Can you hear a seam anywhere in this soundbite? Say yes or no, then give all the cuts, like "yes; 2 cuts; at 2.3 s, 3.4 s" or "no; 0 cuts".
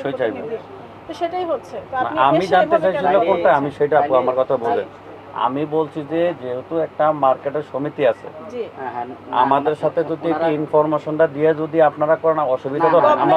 no; 0 cuts